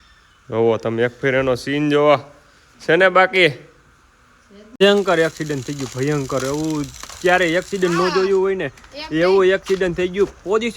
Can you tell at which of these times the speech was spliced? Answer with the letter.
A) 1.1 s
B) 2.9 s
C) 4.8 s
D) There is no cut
C